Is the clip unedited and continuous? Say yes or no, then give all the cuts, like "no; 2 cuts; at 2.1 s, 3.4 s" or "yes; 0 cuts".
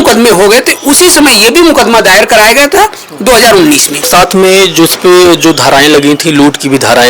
no; 1 cut; at 4.1 s